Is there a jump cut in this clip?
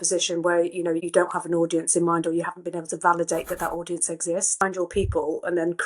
yes; 1 cut; at 4.6 s

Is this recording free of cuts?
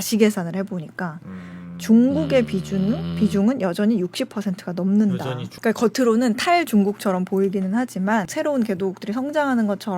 no; 2 cuts; at 5.5 s, 8.3 s

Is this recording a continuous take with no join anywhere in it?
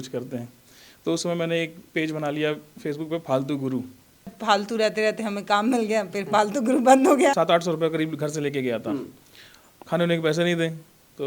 no; 2 cuts; at 4.3 s, 7.3 s

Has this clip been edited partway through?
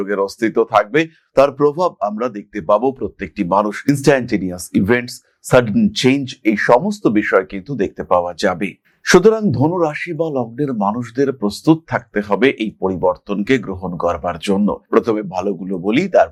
no; 0 cuts

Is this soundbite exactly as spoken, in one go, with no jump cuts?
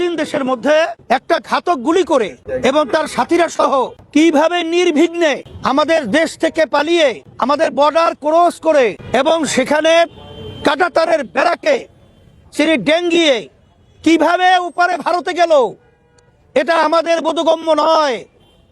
no; 6 cuts; at 1.0 s, 2.4 s, 4.0 s, 5.5 s, 7.3 s, 9.0 s

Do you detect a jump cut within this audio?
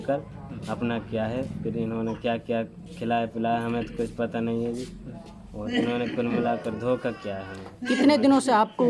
no; 0 cuts

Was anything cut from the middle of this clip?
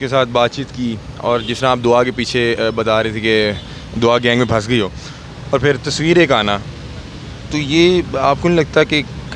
no; 0 cuts

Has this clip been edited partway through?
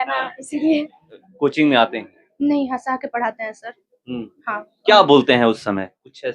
yes; 1 cut; at 1.2 s

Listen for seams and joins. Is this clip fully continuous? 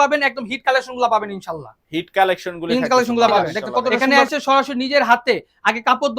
no; 1 cut; at 4.0 s

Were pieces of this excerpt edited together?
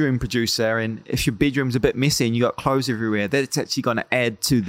no; 0 cuts

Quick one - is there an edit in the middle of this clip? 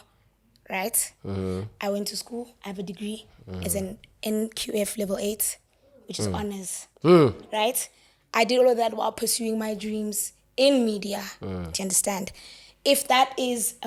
no; 0 cuts

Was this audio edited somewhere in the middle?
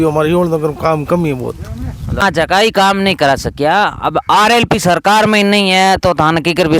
yes; 1 cut; at 2.2 s

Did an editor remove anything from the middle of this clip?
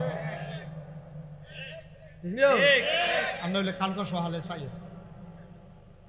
yes; 1 cut; at 1.5 s

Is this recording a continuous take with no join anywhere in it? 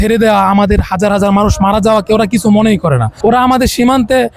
no; 1 cut; at 3.1 s

